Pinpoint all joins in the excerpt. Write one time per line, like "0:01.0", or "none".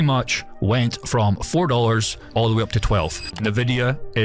0:02.2
0:03.4